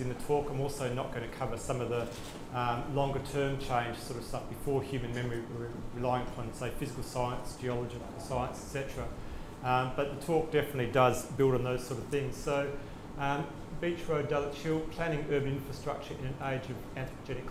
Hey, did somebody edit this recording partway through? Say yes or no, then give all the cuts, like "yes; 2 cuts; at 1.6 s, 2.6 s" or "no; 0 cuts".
no; 0 cuts